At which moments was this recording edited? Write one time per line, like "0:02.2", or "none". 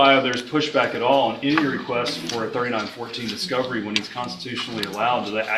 none